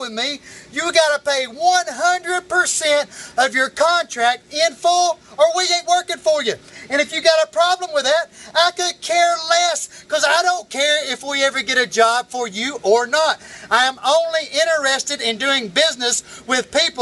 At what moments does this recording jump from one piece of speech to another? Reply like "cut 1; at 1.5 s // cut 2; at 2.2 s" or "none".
none